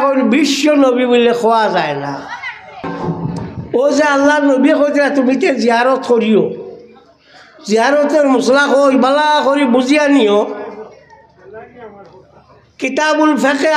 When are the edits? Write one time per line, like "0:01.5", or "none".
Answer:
0:02.9